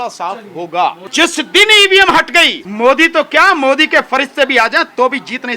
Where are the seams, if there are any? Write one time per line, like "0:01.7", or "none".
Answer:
0:01.0
0:02.6